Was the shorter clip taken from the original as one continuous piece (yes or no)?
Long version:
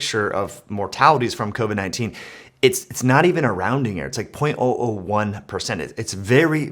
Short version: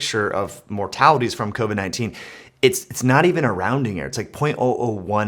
yes